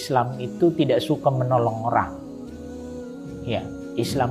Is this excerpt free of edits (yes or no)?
no